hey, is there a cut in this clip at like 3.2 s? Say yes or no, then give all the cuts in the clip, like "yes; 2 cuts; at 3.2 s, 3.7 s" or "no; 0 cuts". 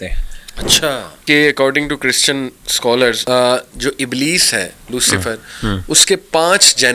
yes; 2 cuts; at 1.2 s, 3.2 s